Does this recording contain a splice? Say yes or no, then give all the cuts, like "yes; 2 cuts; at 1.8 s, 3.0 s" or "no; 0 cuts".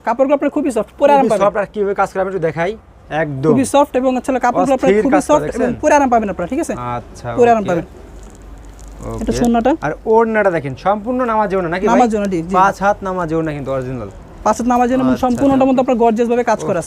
no; 0 cuts